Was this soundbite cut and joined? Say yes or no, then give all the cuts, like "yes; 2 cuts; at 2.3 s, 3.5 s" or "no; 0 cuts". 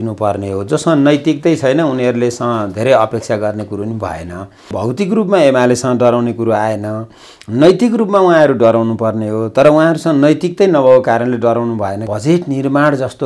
yes; 2 cuts; at 4.8 s, 12.1 s